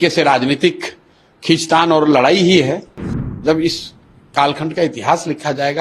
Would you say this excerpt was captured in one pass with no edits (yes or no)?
no